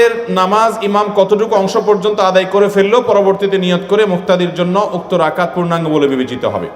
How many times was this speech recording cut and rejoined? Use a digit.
0